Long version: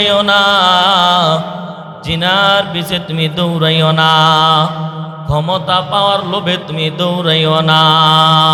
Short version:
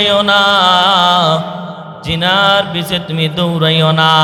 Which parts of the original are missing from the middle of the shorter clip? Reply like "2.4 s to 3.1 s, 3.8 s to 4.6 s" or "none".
none